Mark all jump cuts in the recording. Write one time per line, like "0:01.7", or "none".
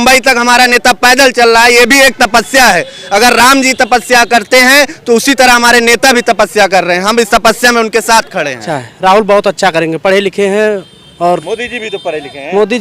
0:08.7

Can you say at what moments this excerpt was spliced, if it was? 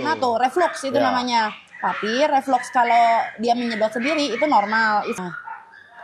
0:05.1

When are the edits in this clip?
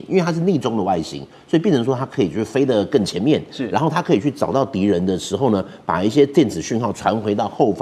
none

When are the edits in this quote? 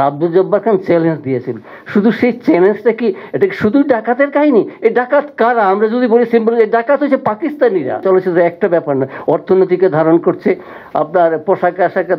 0:08.0

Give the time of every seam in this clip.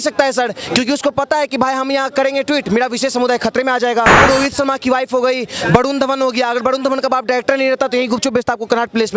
0:04.2

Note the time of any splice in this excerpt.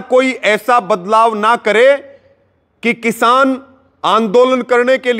none

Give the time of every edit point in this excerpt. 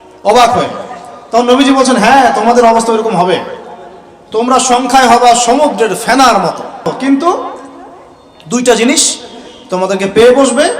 0:06.9

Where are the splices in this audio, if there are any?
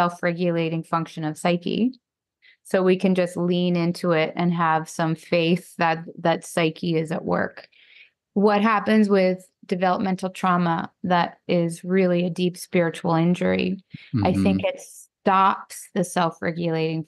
none

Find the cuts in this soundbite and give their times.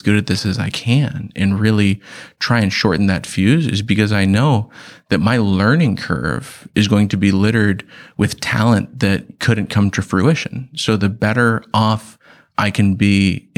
none

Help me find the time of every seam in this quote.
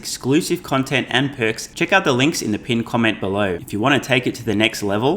0:01.7
0:03.6

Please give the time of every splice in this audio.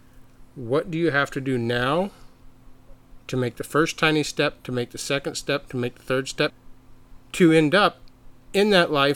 0:06.5

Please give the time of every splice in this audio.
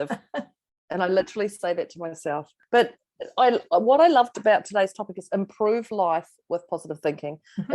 0:02.5

